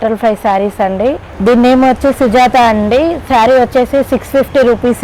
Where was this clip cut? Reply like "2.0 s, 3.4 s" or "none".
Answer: 1.3 s